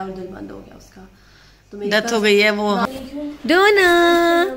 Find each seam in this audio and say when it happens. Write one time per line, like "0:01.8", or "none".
0:02.9